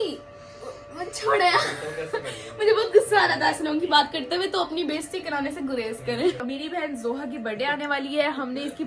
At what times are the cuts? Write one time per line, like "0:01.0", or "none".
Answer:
0:06.4